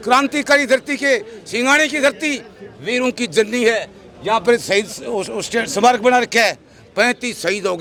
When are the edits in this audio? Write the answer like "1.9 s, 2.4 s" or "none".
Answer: none